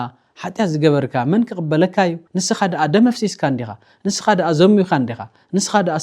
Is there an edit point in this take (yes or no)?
yes